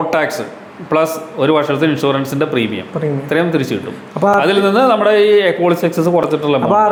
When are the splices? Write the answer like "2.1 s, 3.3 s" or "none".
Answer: none

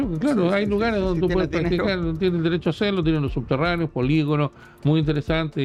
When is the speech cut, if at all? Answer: none

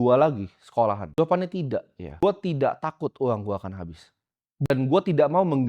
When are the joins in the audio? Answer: 1.1 s, 2.0 s, 4.7 s

